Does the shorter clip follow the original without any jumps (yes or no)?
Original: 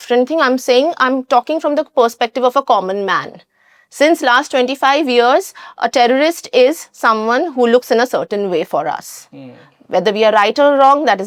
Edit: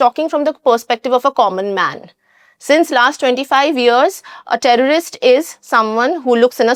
yes